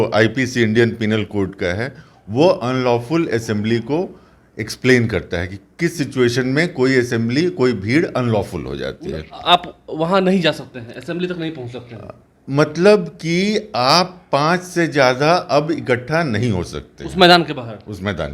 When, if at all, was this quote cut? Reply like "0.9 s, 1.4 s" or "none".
none